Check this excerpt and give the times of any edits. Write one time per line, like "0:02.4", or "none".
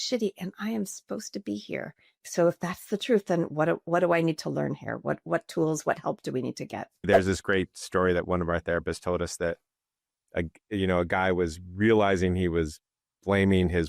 0:02.2
0:07.1